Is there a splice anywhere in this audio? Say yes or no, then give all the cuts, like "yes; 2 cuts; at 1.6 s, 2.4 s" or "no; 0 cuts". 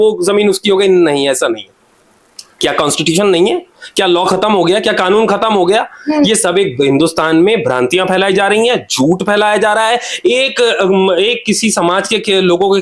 no; 0 cuts